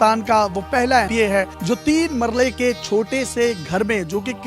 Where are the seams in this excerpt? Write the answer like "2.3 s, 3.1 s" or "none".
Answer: 1.1 s